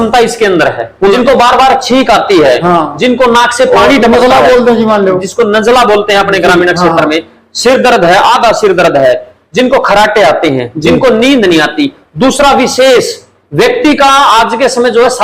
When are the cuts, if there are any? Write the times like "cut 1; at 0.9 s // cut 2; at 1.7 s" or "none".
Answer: cut 1; at 1.1 s